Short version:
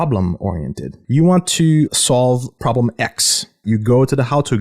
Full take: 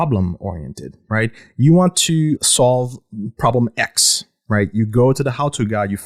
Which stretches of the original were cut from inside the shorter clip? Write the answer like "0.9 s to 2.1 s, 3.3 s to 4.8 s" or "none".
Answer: 0.9 s to 1.4 s, 3.0 s to 3.3 s, 4.4 s to 4.7 s